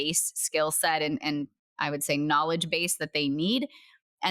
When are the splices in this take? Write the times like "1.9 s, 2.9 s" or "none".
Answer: none